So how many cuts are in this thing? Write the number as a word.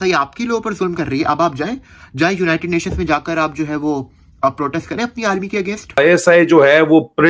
one